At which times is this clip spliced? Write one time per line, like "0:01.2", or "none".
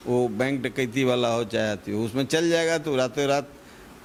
none